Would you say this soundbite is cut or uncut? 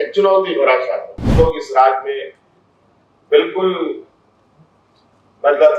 cut